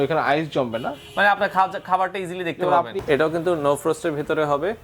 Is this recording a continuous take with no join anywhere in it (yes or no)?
no